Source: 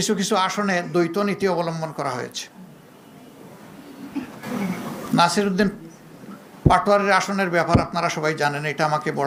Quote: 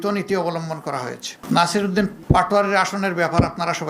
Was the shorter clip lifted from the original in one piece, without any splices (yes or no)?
no